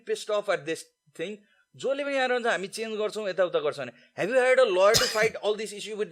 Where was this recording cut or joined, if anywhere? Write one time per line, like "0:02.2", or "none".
none